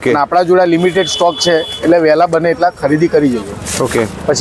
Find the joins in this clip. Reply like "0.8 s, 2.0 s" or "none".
none